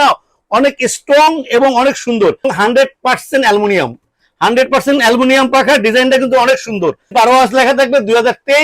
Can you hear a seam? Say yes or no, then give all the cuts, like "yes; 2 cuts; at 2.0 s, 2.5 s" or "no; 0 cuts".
yes; 2 cuts; at 2.5 s, 7.0 s